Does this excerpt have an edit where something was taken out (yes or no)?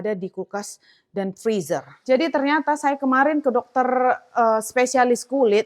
yes